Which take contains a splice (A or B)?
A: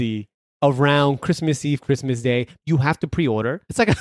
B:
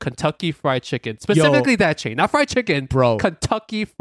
A